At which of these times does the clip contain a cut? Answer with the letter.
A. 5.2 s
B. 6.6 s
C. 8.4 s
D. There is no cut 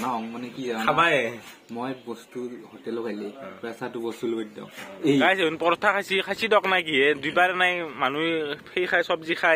A